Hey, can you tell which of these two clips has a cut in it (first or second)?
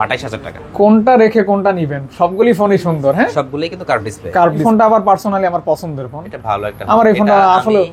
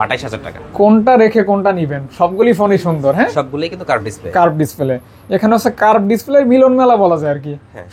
first